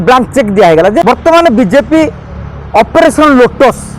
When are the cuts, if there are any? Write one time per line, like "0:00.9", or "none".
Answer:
0:01.0